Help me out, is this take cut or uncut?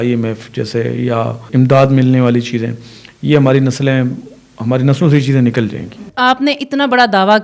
cut